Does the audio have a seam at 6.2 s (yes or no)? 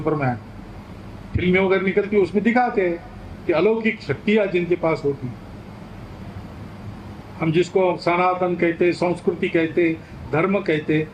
yes